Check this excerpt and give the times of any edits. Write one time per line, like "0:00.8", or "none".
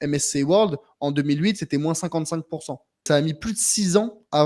0:03.0